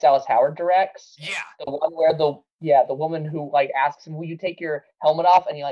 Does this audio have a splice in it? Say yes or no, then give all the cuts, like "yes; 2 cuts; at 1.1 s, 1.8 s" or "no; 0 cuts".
yes; 1 cut; at 2.5 s